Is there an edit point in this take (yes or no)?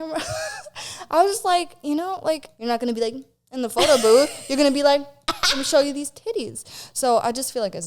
yes